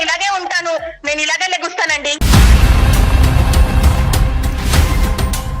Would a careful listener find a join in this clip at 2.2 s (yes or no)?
yes